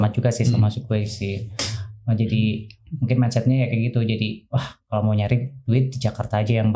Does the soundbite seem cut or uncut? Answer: uncut